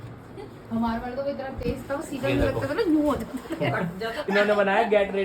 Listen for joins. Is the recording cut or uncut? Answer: cut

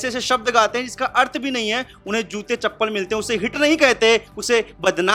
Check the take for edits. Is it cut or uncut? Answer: uncut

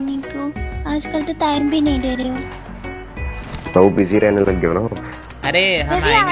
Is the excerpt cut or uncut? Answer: uncut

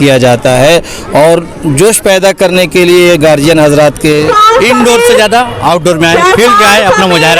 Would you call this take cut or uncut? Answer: cut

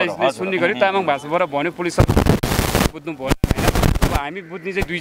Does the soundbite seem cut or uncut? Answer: uncut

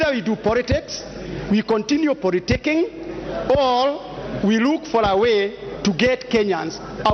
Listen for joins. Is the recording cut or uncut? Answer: uncut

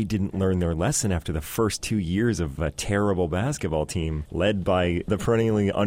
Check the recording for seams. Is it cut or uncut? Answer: cut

